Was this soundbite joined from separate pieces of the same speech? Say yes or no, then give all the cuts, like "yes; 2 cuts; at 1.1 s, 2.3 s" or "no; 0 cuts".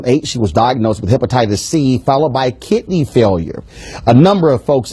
no; 0 cuts